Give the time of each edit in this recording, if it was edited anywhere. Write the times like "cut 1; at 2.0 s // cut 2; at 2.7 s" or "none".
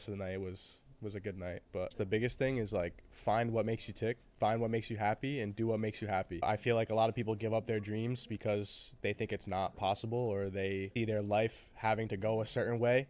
cut 1; at 1.9 s // cut 2; at 4.3 s // cut 3; at 6.4 s // cut 4; at 10.9 s